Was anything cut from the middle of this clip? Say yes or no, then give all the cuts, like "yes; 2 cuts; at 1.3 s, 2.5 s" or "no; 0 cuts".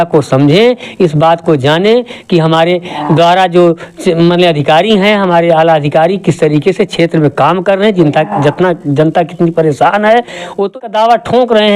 yes; 1 cut; at 10.7 s